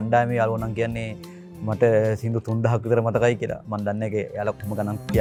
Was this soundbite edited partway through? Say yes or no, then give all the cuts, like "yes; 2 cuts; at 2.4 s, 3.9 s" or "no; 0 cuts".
no; 0 cuts